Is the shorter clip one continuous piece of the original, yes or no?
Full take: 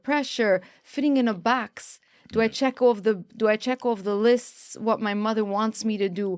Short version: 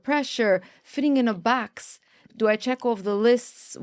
no